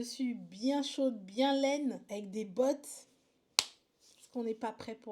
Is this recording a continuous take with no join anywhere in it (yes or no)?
no